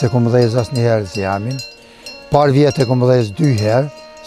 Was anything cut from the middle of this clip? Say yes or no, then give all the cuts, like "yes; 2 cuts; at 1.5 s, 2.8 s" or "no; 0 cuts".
no; 0 cuts